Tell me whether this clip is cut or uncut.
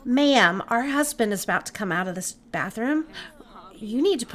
uncut